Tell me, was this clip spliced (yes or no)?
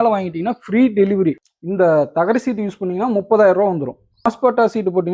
yes